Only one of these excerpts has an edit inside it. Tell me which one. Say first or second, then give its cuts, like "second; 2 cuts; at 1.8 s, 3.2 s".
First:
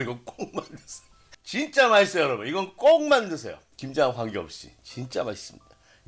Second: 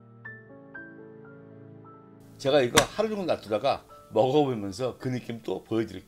second; 1 cut; at 2.2 s